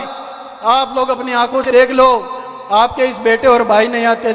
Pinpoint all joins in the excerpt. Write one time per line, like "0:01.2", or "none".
0:01.7